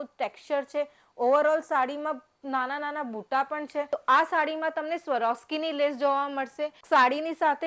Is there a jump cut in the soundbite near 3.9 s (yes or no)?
yes